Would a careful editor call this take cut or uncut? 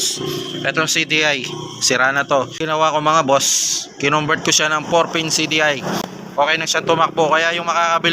cut